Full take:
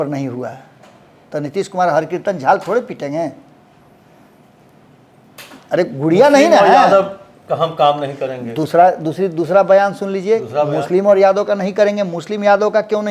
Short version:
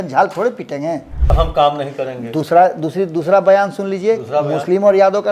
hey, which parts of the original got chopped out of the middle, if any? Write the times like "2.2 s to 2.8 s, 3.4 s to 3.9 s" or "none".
3.4 s to 7.4 s